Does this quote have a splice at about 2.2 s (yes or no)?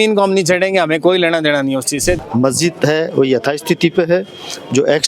yes